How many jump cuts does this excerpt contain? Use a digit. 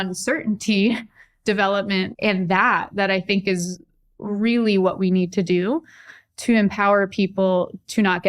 1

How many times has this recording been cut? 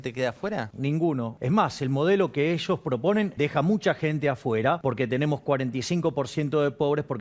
3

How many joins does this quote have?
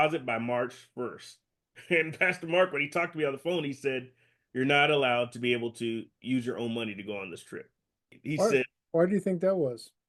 0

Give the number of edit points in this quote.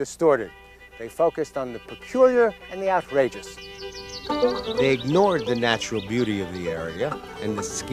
1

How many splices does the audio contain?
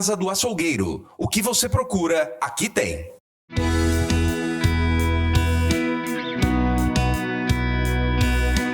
0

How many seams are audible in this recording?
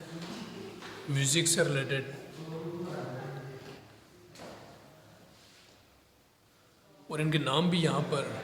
0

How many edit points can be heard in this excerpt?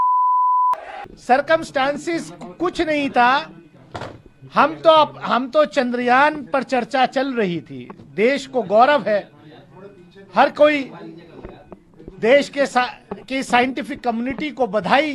1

